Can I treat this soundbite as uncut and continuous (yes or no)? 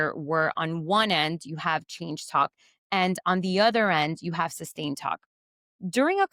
yes